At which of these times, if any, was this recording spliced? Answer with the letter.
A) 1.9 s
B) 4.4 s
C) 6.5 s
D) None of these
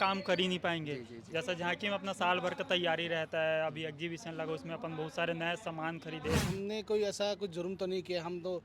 C